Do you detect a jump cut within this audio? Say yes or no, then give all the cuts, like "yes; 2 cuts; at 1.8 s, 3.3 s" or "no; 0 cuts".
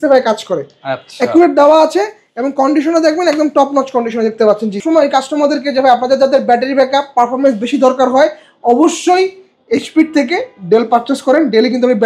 yes; 1 cut; at 4.8 s